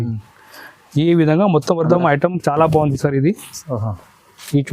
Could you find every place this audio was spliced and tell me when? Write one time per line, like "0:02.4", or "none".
0:01.9